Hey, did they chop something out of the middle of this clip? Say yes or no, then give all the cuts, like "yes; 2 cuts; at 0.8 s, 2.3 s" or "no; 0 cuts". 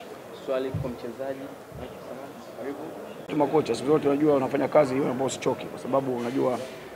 yes; 1 cut; at 3.3 s